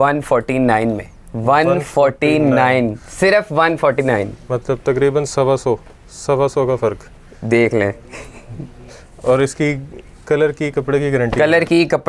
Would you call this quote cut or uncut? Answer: uncut